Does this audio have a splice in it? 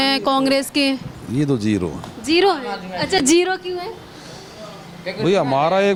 no; 0 cuts

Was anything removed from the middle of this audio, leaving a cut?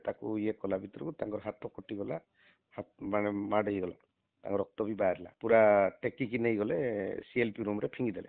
yes; 1 cut; at 5.3 s

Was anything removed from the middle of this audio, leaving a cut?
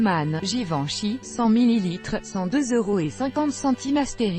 no; 0 cuts

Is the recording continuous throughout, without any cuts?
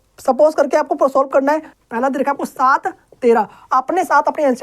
no; 1 cut; at 1.7 s

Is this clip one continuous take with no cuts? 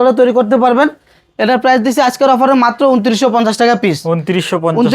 yes; 0 cuts

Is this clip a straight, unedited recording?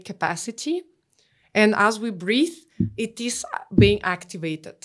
yes; 0 cuts

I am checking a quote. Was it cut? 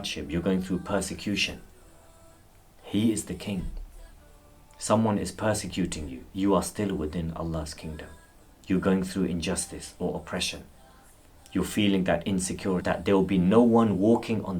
yes; 1 cut; at 12.9 s

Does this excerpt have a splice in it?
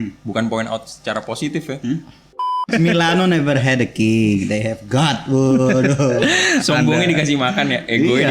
yes; 1 cut; at 2.7 s

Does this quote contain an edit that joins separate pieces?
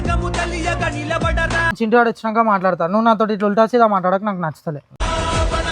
yes; 1 cut; at 1.7 s

